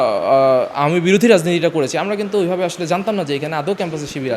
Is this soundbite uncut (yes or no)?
yes